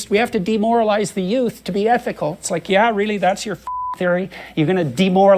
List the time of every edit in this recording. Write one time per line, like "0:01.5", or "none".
none

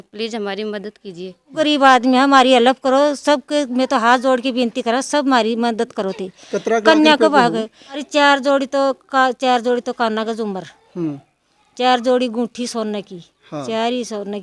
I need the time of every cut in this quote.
0:01.5
0:08.0

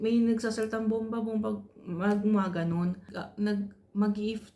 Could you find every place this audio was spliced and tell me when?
0:03.2

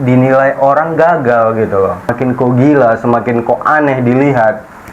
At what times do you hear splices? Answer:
0:02.1

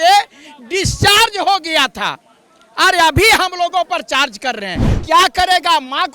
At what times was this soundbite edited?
0:04.9

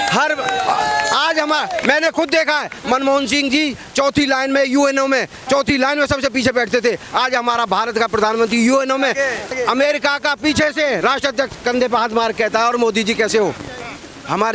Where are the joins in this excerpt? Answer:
0:09.6

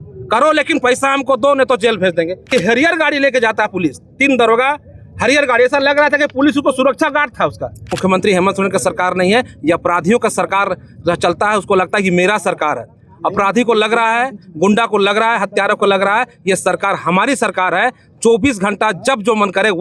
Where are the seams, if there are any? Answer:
0:02.5
0:07.9

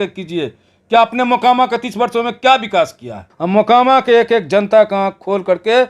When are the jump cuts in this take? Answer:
0:03.3

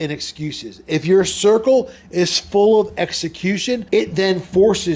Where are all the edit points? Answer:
0:03.8

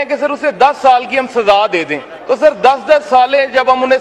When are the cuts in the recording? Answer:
0:02.1

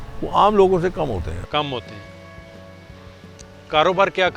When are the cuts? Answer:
none

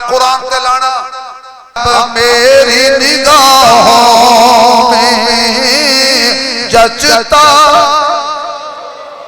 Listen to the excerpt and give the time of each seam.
0:01.8

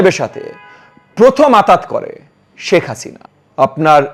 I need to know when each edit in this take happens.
none

